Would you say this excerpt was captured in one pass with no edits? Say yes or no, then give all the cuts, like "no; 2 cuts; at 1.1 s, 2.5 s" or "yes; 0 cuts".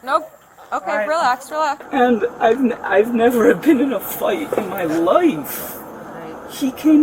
no; 1 cut; at 1.8 s